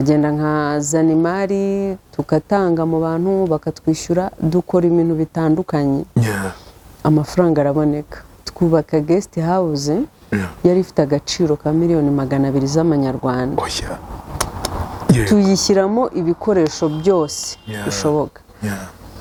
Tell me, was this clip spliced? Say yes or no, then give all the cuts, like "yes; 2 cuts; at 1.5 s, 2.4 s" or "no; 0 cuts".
no; 0 cuts